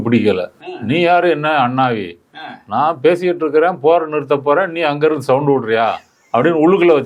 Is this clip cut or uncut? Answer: uncut